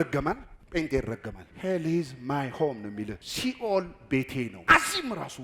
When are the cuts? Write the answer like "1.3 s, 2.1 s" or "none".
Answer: 1.4 s, 3.2 s, 4.6 s